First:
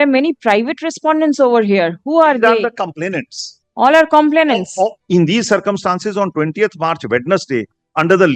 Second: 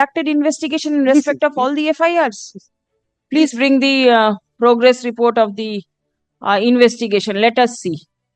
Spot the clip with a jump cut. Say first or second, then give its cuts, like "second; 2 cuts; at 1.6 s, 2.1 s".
first; 1 cut; at 5.0 s